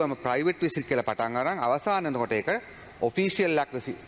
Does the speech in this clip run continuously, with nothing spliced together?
yes; 0 cuts

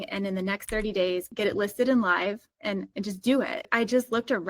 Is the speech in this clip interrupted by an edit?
yes; 3 cuts; at 1.3 s, 2.5 s, 3.7 s

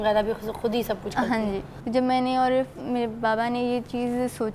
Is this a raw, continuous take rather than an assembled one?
no; 1 cut; at 1.7 s

